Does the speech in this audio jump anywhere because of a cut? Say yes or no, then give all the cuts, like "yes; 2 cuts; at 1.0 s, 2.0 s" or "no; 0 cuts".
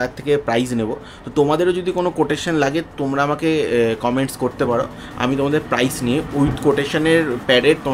no; 0 cuts